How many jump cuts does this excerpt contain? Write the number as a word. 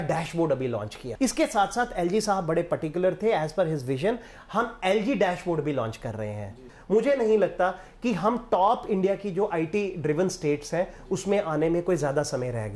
two